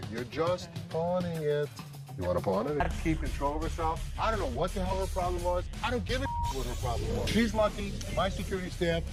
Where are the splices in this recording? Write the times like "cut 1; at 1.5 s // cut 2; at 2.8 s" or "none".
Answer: none

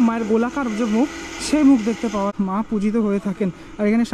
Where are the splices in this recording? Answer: cut 1; at 2.3 s

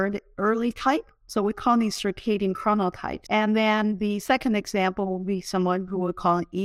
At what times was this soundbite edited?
cut 1; at 1.2 s // cut 2; at 3.1 s

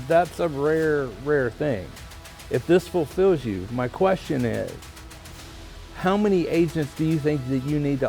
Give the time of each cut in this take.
none

